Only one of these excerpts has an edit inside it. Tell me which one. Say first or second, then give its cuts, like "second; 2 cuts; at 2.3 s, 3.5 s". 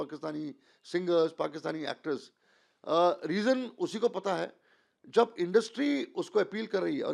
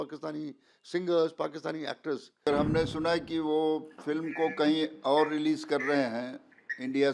second; 1 cut; at 2.5 s